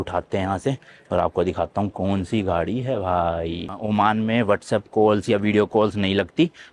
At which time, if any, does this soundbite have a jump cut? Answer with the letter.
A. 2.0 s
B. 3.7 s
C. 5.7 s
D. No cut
B